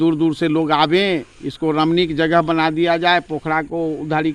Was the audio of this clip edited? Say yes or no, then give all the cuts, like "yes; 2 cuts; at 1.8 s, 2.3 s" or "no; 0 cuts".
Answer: no; 0 cuts